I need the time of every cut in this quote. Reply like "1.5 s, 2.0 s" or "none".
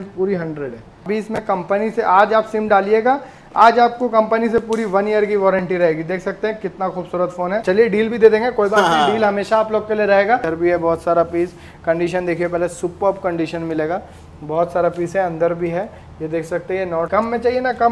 1.1 s, 7.6 s, 10.5 s, 17.1 s

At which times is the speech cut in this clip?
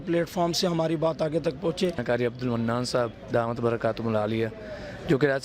2.0 s

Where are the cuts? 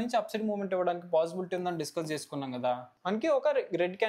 2.9 s

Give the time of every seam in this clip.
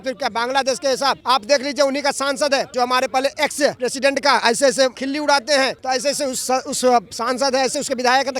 1.2 s, 2.7 s, 3.8 s, 5.0 s, 5.8 s

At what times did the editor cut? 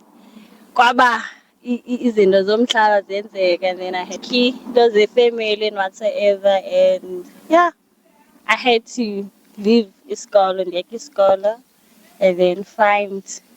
4.2 s

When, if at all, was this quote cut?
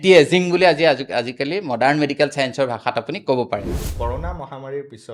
3.9 s

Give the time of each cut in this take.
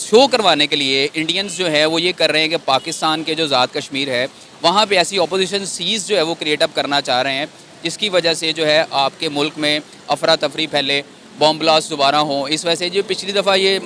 none

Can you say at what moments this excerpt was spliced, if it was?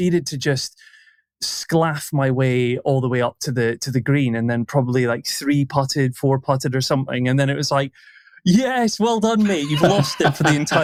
none

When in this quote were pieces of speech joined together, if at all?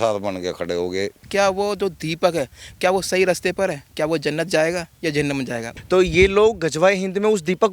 1.3 s, 5.7 s

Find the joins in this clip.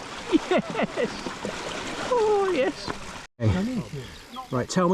3.2 s

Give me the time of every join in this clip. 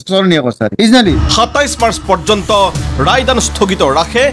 1.2 s

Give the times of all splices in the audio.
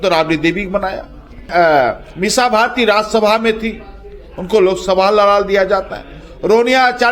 none

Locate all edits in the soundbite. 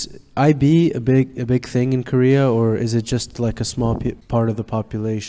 4.2 s

